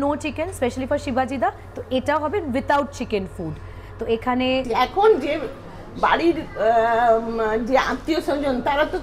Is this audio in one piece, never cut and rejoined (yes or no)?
no